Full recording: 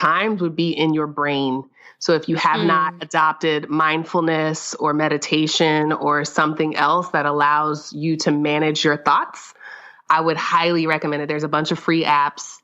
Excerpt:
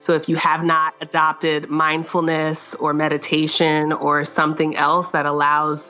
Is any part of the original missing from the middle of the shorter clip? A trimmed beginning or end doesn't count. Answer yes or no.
no